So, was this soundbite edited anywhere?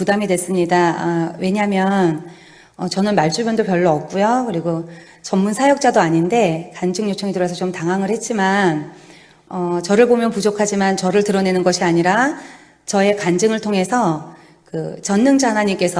no; 0 cuts

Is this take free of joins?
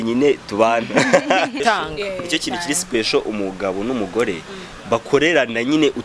no; 1 cut; at 1.6 s

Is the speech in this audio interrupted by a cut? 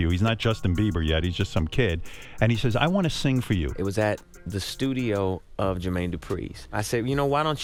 no; 0 cuts

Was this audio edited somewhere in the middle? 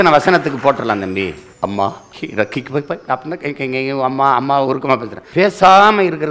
yes; 2 cuts; at 1.8 s, 5.2 s

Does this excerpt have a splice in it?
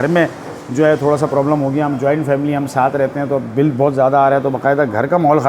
no; 0 cuts

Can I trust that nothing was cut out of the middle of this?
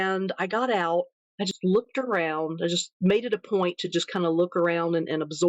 no; 1 cut; at 1.1 s

